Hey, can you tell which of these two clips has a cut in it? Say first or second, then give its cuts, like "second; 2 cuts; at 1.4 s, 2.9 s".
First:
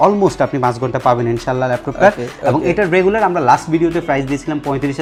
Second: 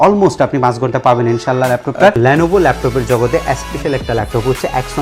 second; 1 cut; at 2.2 s